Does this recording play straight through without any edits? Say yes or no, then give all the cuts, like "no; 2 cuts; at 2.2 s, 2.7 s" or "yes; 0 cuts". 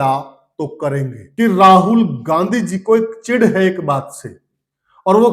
no; 1 cut; at 1.2 s